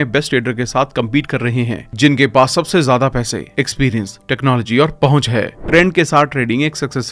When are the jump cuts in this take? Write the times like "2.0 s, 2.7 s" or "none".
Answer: 5.6 s